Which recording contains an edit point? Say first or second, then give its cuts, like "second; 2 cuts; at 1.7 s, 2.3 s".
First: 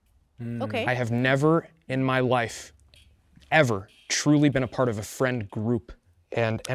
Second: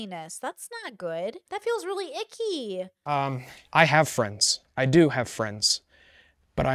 second; 2 cuts; at 1.4 s, 3.0 s